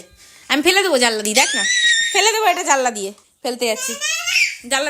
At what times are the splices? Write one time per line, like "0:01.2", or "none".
0:03.2

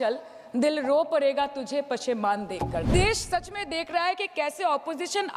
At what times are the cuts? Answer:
0:02.9

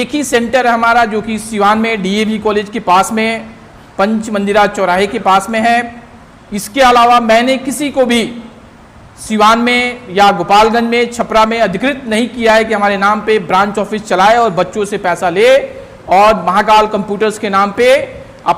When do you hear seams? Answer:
none

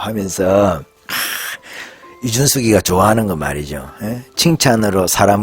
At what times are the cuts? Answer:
0:01.0

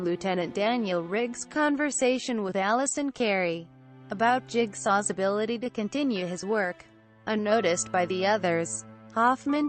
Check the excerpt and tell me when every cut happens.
0:07.2

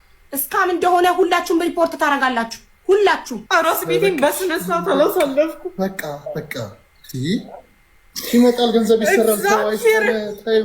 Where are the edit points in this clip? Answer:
0:03.4

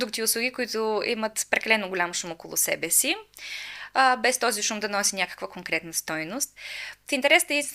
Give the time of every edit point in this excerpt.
none

